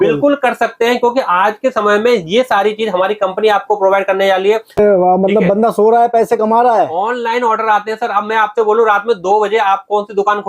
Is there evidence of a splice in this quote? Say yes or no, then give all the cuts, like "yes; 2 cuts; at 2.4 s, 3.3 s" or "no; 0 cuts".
yes; 1 cut; at 4.8 s